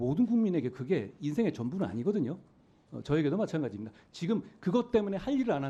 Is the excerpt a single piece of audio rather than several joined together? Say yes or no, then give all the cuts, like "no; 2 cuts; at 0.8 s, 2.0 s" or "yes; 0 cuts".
yes; 0 cuts